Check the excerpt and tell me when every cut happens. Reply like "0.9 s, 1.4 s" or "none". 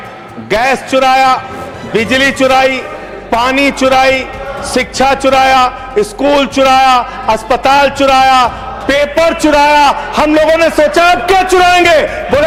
none